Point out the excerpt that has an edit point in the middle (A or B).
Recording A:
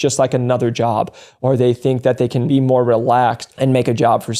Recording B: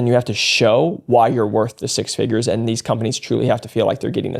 A